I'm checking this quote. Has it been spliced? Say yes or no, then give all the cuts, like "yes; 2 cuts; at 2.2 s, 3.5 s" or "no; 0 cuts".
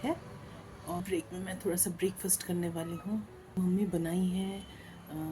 yes; 2 cuts; at 1.0 s, 3.6 s